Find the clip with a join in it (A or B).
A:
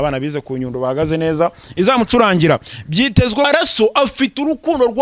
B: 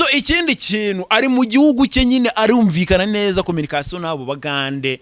A